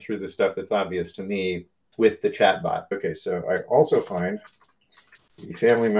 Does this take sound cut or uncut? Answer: cut